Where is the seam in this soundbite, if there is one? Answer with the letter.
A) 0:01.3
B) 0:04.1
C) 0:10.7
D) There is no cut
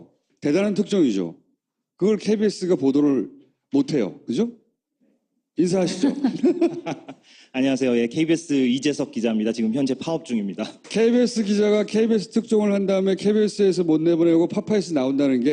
C